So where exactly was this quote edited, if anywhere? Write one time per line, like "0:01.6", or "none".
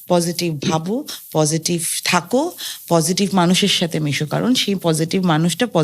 none